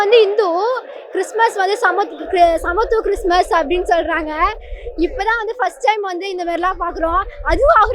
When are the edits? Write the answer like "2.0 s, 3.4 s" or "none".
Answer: none